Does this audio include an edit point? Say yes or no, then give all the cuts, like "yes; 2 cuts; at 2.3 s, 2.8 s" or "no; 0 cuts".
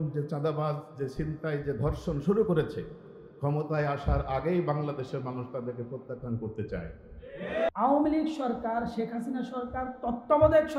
yes; 1 cut; at 7.7 s